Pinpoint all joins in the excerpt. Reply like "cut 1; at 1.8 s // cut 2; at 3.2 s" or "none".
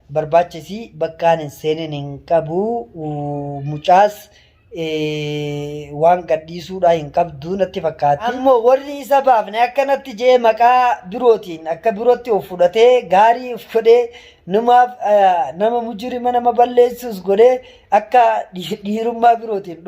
cut 1; at 8.4 s

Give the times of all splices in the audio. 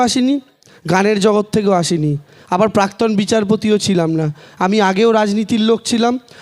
none

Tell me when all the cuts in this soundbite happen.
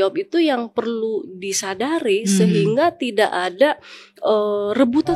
none

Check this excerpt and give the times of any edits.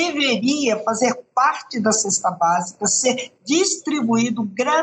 none

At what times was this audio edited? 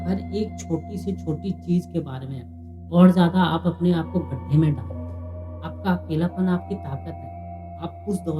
cut 1; at 2.8 s

